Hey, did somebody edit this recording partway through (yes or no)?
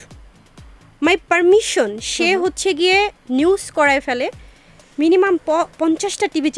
no